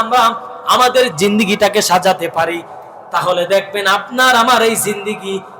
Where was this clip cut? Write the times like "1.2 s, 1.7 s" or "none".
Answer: 1.1 s